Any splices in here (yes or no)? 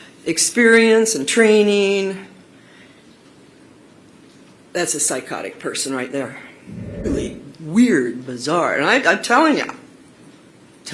yes